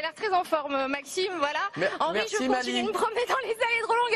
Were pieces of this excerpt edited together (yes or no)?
no